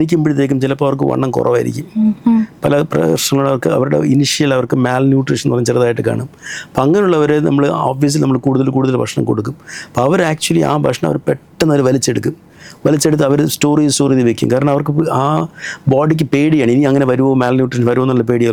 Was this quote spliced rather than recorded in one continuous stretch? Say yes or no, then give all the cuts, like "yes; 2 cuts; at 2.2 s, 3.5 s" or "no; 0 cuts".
no; 0 cuts